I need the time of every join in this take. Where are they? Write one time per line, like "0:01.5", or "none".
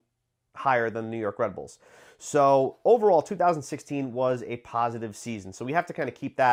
none